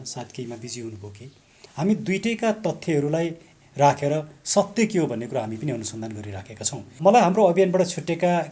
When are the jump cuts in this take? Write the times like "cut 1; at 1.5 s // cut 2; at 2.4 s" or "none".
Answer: cut 1; at 1.6 s // cut 2; at 7.0 s

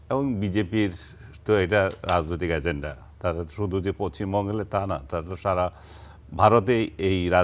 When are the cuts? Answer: none

